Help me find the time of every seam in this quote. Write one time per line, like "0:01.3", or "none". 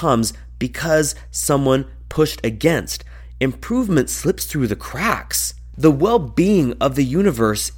0:05.6